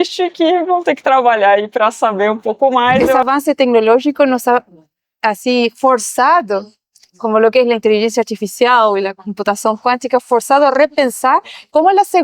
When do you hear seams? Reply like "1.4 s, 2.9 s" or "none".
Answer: 3.2 s